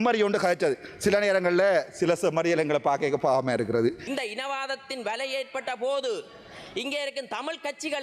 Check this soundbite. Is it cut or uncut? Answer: cut